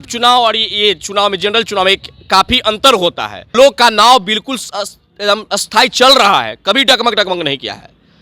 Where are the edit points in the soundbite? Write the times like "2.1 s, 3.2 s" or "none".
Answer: 3.5 s